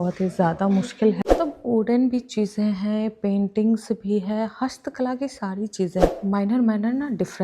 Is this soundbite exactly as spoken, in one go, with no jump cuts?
no; 2 cuts; at 1.2 s, 6.1 s

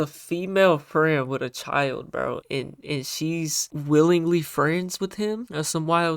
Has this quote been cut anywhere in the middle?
yes; 3 cuts; at 2.4 s, 3.6 s, 5.1 s

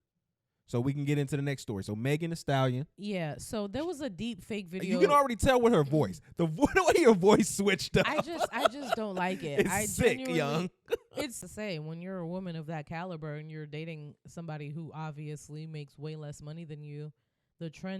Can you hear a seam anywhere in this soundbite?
yes; 1 cut; at 11.5 s

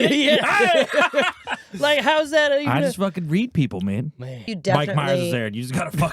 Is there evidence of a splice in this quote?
yes; 1 cut; at 4.5 s

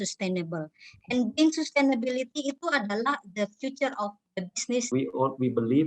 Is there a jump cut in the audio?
yes; 1 cut; at 4.9 s

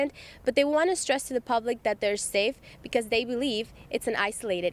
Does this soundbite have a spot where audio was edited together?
no; 0 cuts

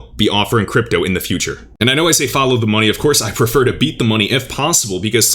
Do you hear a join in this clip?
yes; 1 cut; at 1.6 s

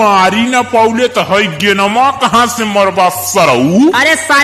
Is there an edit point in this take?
no; 0 cuts

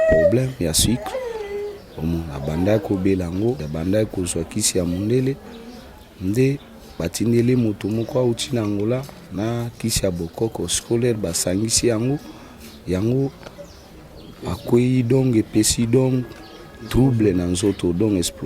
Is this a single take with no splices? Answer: no; 1 cut; at 3.6 s

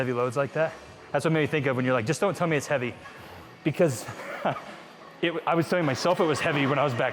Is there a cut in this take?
no; 0 cuts

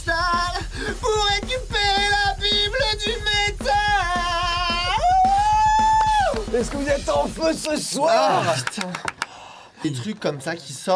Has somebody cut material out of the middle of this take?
yes; 1 cut; at 9.8 s

